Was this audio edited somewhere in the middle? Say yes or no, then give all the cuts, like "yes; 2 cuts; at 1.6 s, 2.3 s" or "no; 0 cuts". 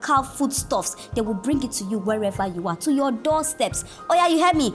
yes; 1 cut; at 0.9 s